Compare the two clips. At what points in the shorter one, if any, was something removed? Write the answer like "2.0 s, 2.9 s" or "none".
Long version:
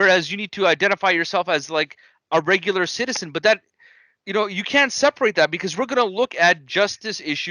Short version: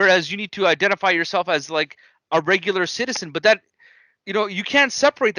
none